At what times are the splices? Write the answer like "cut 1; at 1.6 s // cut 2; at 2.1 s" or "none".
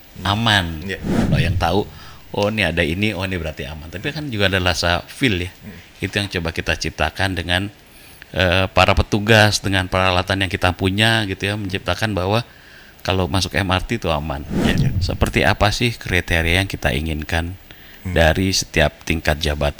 cut 1; at 1.3 s // cut 2; at 14.6 s